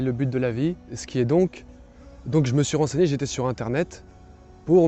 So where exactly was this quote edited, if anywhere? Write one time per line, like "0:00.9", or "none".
0:01.0